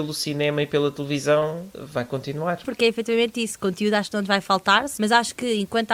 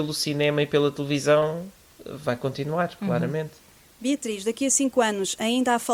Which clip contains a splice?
first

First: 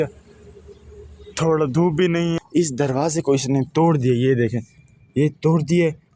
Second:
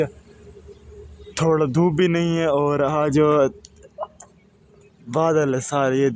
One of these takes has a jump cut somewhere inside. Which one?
first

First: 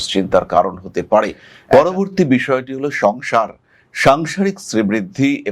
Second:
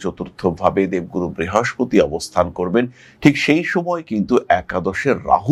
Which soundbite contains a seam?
first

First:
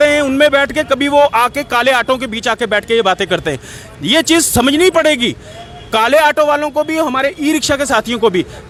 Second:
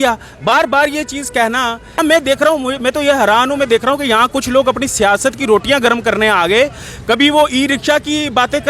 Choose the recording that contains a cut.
second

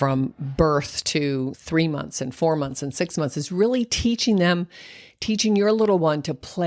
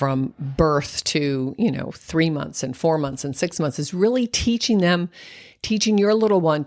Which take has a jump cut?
first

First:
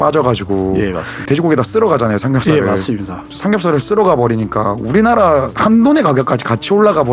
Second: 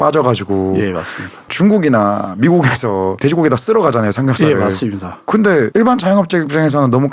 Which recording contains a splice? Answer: first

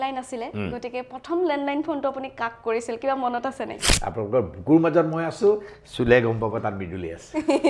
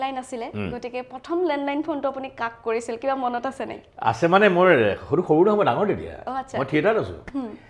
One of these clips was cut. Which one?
first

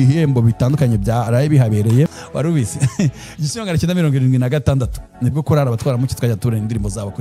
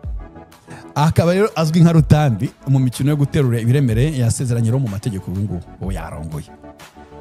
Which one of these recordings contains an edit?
first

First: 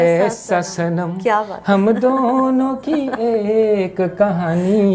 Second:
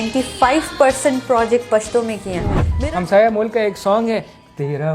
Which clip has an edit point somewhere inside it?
second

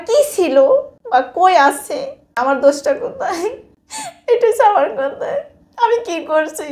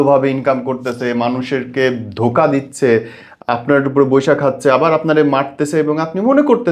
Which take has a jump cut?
first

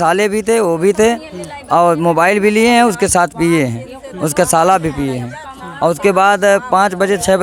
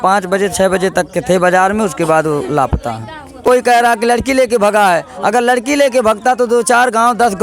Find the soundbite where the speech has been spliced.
second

